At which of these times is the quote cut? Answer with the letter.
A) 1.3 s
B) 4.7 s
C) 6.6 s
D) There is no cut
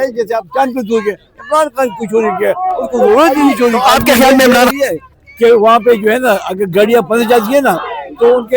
B